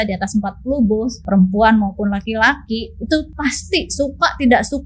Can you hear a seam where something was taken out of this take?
yes; 2 cuts; at 1.2 s, 3.3 s

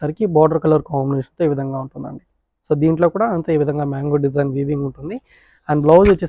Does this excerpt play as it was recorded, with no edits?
yes; 0 cuts

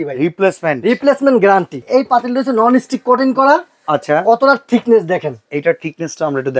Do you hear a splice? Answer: yes; 1 cut; at 1.8 s

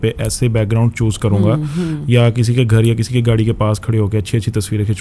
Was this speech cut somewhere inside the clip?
no; 0 cuts

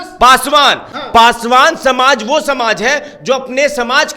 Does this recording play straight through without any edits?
no; 1 cut; at 0.9 s

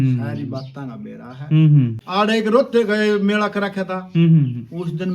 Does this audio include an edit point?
yes; 1 cut; at 2.0 s

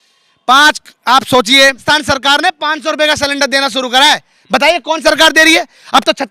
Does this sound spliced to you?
yes; 1 cut; at 1.8 s

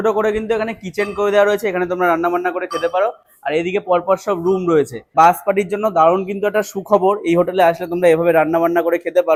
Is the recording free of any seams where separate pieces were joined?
yes; 0 cuts

